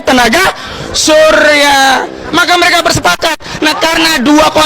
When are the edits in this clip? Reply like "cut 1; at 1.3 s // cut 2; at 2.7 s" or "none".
cut 1; at 2.3 s